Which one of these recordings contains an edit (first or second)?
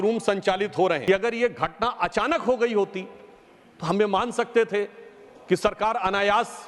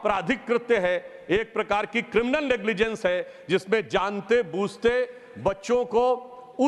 first